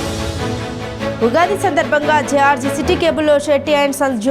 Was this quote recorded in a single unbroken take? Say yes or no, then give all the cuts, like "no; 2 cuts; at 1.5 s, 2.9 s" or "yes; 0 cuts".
no; 1 cut; at 1.2 s